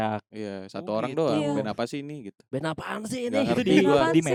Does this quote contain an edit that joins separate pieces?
no; 0 cuts

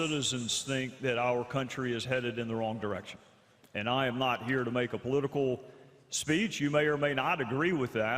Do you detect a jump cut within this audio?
yes; 1 cut; at 2.8 s

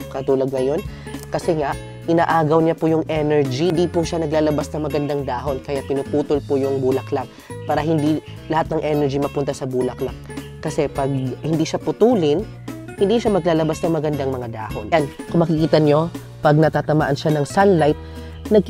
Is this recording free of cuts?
no; 2 cuts; at 3.7 s, 14.7 s

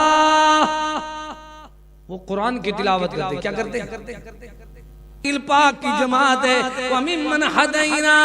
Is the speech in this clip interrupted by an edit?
yes; 1 cut; at 5.2 s

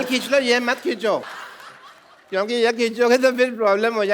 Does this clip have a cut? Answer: yes; 1 cut; at 1.4 s

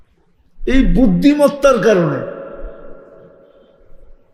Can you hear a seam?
no; 0 cuts

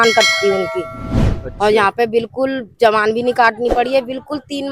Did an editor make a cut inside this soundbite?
yes; 1 cut; at 1.1 s

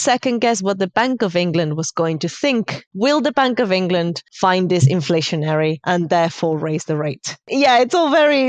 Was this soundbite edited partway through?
yes; 4 cuts; at 2.8 s, 4.2 s, 5.8 s, 7.5 s

